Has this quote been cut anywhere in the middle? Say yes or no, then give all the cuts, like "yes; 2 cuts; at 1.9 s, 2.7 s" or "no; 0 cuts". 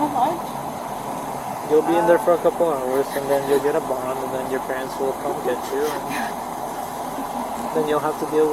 no; 0 cuts